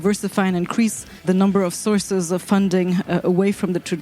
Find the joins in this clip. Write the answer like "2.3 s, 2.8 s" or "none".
1.2 s